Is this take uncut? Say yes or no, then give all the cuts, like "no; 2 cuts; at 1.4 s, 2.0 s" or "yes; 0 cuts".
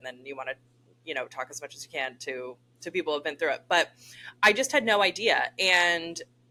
yes; 0 cuts